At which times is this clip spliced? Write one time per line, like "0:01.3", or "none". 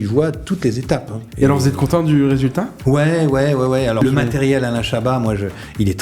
0:01.2
0:02.7
0:04.0